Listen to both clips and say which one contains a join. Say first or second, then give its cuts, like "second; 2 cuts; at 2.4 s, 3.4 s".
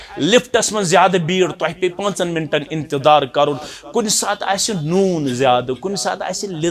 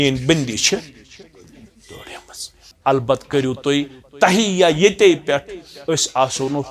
second; 1 cut; at 2.7 s